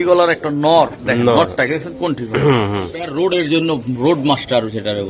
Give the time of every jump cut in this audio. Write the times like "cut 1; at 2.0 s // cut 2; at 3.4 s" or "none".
cut 1; at 3.0 s